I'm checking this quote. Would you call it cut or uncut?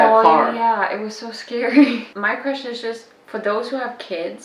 cut